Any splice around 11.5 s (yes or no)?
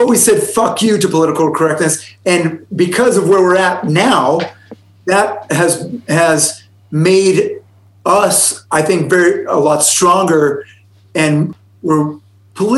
yes